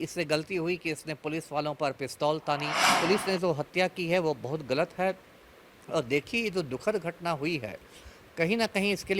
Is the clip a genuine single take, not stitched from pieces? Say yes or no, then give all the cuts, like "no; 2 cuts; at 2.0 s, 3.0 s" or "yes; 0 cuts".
no; 1 cut; at 3.0 s